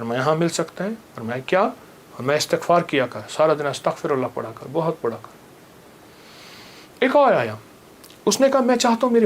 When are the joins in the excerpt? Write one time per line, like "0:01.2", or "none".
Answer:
none